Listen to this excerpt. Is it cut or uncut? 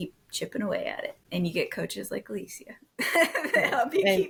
uncut